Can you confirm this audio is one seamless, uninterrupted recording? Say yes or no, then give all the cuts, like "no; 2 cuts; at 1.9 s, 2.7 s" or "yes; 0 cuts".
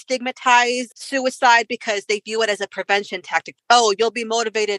no; 2 cuts; at 0.9 s, 3.5 s